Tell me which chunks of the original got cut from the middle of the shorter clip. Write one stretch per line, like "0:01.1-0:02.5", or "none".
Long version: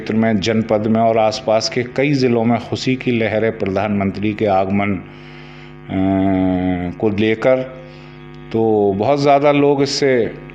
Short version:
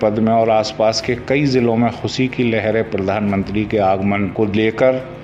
0:05.0-0:07.0